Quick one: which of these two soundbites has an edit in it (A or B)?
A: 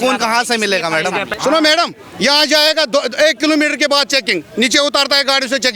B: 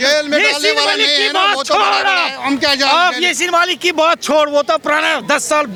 A